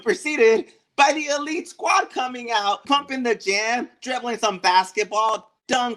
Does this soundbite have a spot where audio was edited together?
yes; 1 cut; at 2.8 s

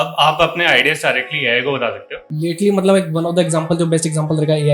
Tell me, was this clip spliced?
yes; 1 cut; at 2.3 s

